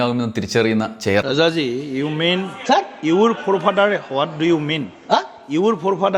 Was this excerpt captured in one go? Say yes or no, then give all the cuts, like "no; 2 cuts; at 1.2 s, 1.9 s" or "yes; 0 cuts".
no; 1 cut; at 1.2 s